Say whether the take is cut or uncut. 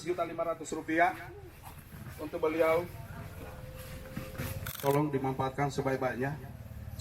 cut